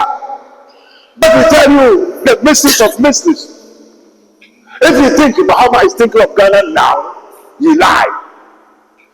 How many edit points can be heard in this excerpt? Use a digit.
1